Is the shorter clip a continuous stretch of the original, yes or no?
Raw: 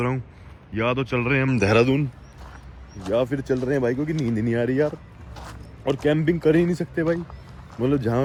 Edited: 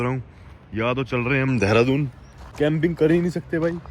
no